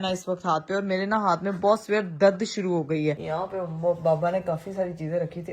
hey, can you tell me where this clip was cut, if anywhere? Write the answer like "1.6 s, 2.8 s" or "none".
3.2 s